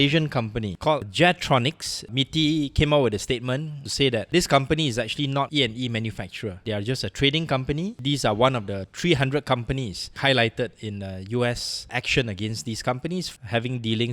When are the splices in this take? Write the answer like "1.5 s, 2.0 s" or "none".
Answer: 0.8 s, 2.1 s, 3.8 s, 10.1 s, 11.7 s, 13.3 s